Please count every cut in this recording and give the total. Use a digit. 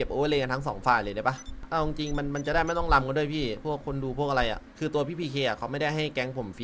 2